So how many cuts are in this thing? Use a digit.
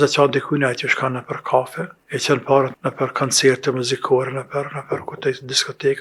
2